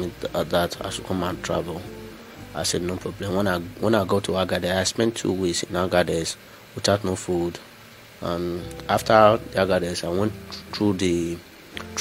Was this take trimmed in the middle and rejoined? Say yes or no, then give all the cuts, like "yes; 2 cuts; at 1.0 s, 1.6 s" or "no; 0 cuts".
no; 0 cuts